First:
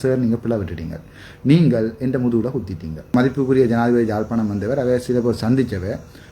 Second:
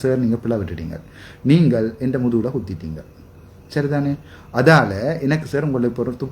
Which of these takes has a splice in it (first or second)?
first